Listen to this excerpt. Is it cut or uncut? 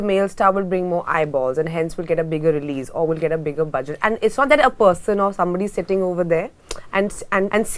uncut